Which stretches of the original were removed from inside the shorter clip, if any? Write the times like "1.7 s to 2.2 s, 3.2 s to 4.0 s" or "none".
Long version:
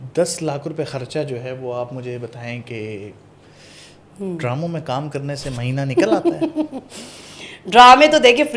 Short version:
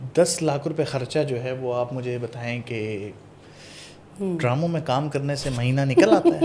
none